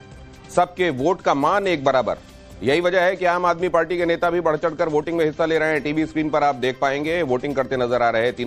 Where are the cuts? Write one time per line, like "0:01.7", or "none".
0:03.5